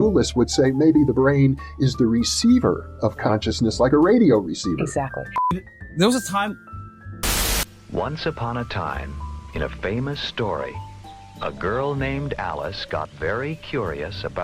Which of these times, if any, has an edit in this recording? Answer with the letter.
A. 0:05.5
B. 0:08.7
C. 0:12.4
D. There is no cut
A